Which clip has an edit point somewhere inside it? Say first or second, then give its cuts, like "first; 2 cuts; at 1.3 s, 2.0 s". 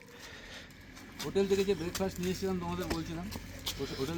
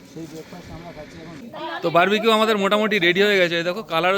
second; 1 cut; at 1.3 s